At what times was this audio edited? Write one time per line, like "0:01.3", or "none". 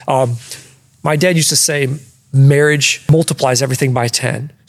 0:03.0

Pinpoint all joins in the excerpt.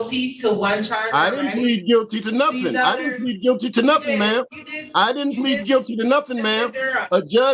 none

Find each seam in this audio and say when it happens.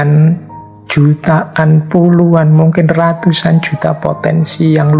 none

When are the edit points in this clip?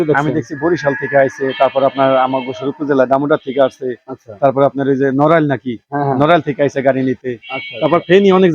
none

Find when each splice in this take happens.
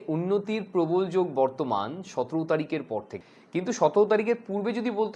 0:03.2

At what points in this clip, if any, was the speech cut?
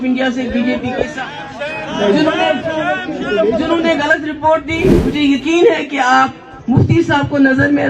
0:05.0

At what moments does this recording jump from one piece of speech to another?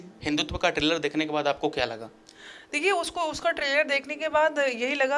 none

